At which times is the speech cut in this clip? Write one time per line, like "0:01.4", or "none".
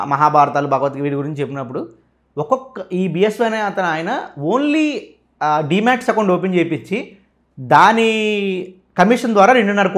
none